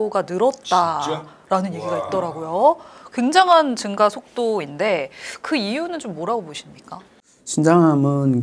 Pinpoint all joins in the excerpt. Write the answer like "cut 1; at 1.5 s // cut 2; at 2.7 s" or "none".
none